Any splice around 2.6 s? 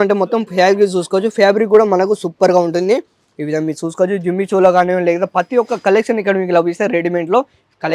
no; 0 cuts

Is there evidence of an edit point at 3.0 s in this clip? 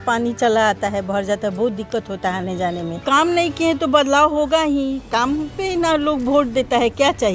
yes; 1 cut; at 3.0 s

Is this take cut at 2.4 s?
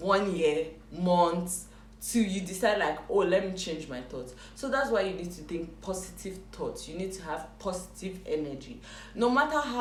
no; 0 cuts

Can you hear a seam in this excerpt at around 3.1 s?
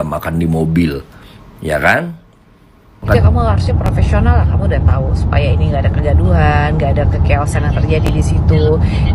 yes; 1 cut; at 3.1 s

